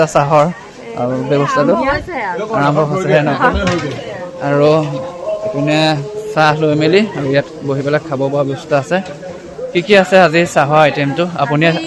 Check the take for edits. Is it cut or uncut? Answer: uncut